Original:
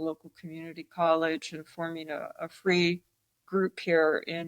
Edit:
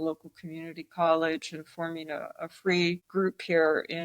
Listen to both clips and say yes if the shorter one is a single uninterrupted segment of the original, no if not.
no